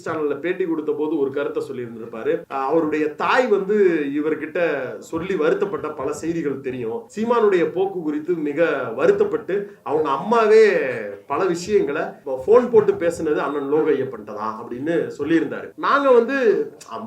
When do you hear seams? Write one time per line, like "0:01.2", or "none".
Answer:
0:02.5
0:07.1
0:12.2
0:15.7